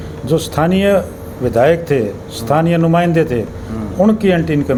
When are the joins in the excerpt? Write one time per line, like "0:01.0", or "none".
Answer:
none